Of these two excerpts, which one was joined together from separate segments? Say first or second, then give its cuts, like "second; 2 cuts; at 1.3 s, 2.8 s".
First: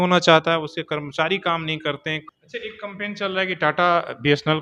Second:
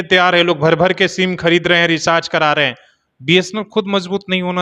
first; 1 cut; at 2.3 s